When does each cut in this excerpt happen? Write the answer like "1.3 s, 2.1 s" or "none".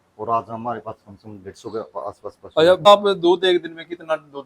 2.9 s